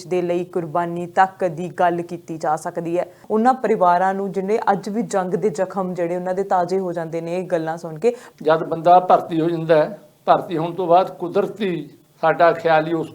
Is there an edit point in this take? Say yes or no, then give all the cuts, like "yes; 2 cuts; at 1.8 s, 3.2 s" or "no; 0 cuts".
yes; 2 cuts; at 3.2 s, 8.2 s